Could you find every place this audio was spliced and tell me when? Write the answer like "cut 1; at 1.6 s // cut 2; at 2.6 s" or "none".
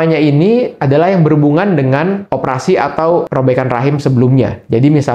cut 1; at 3.3 s